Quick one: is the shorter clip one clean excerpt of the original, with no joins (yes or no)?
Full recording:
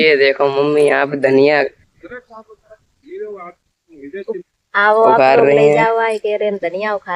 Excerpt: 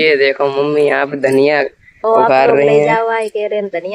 no